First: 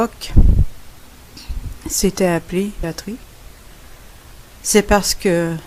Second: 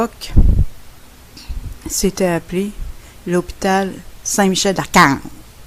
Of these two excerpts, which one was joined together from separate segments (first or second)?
second